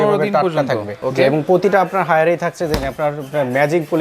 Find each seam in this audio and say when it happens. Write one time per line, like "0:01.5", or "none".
0:01.0